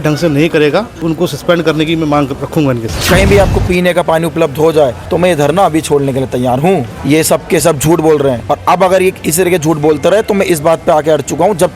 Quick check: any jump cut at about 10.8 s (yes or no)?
no